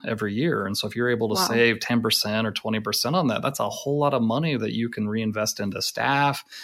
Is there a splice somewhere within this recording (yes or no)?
no